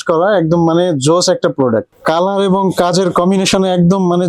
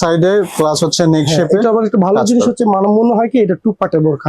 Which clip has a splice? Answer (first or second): first